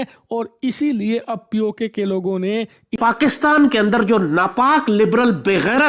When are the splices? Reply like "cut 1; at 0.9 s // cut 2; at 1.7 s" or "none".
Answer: cut 1; at 2.8 s

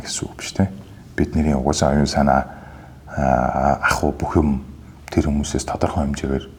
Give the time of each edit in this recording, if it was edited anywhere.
none

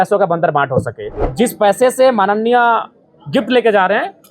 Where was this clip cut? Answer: cut 1; at 1.2 s

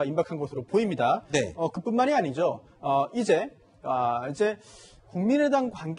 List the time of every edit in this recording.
none

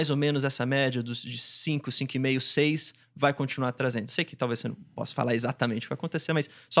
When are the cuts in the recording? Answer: none

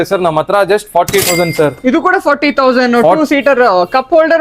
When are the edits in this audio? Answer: none

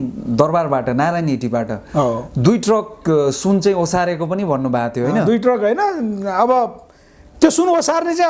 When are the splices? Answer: none

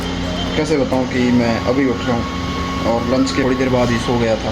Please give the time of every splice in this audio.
cut 1; at 3.4 s

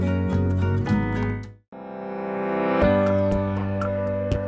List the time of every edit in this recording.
none

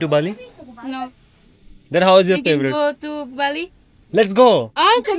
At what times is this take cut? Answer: none

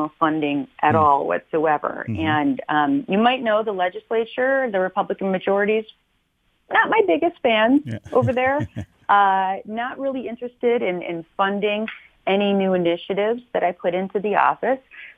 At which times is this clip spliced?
none

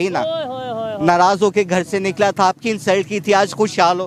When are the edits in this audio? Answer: none

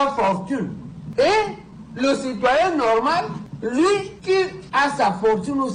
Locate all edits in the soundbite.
none

